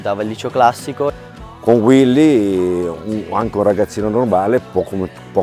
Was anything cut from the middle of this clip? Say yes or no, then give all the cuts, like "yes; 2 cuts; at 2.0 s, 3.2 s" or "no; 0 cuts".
yes; 1 cut; at 1.3 s